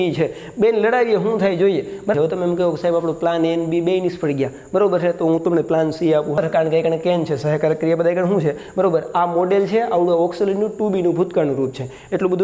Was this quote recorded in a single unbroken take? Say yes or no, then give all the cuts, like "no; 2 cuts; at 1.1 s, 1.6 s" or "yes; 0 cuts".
no; 2 cuts; at 2.1 s, 6.4 s